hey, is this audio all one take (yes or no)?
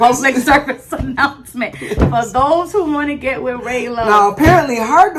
yes